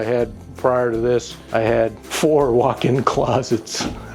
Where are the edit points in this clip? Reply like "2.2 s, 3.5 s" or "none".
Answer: 1.4 s, 2.1 s